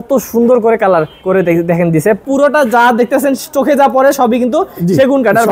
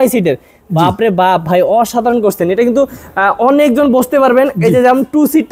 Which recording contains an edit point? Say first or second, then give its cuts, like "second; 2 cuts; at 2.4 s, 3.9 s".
first; 2 cuts; at 1.1 s, 2.2 s